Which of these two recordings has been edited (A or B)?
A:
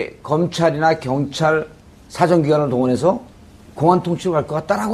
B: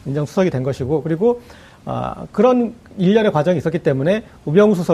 B